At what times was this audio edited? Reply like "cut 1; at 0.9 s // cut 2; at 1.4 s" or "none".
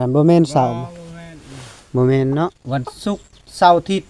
cut 1; at 2.6 s